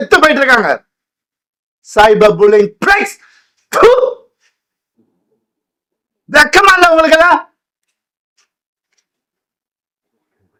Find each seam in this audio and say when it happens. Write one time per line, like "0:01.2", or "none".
none